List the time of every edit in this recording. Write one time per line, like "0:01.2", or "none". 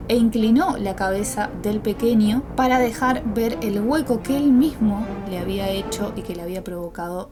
none